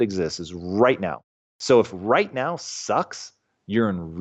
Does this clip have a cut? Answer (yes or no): no